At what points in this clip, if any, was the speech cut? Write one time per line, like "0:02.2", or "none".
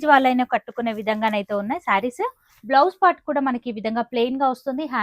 0:02.5